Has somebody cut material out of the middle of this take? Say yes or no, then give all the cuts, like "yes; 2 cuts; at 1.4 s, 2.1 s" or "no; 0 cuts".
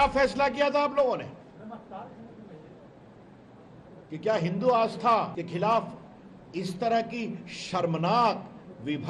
yes; 1 cut; at 5.3 s